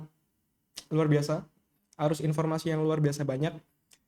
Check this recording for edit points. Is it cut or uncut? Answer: uncut